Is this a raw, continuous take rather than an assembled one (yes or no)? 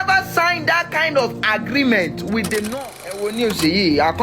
no